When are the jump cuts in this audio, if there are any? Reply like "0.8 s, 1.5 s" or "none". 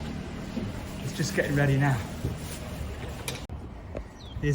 3.5 s